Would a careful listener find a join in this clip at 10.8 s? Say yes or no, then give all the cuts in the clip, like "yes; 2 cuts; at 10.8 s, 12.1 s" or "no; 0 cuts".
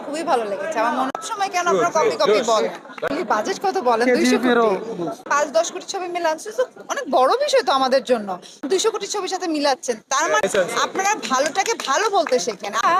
no; 1 cut; at 1.1 s